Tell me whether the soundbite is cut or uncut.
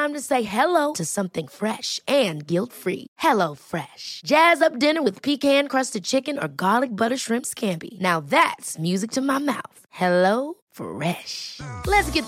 uncut